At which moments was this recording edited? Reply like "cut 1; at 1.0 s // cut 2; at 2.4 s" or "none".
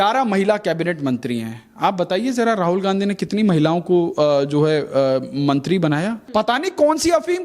cut 1; at 6.2 s